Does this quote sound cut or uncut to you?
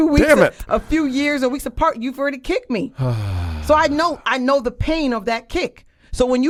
uncut